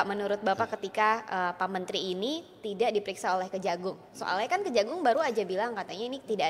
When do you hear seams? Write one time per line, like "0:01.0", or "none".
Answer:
none